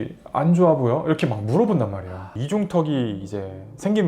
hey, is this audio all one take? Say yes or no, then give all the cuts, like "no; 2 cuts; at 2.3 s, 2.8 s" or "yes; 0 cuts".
no; 1 cut; at 2.3 s